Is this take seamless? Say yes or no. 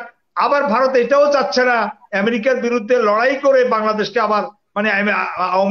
yes